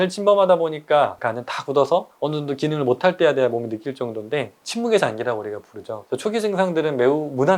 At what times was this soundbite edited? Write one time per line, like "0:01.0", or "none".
0:01.2
0:02.1
0:04.5
0:06.0